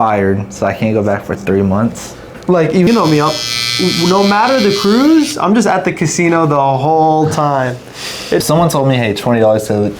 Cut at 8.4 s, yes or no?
yes